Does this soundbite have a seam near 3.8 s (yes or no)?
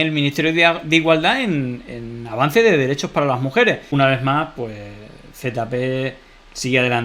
yes